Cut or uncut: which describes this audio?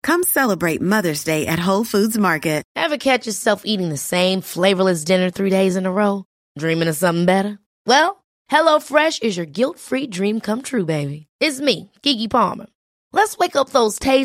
cut